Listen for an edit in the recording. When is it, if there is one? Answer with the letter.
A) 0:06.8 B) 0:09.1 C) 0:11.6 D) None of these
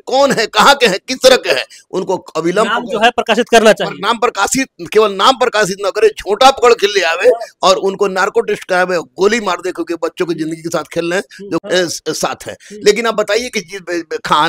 C